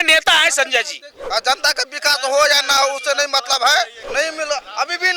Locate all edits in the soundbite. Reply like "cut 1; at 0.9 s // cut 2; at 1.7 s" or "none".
cut 1; at 1.1 s // cut 2; at 4.0 s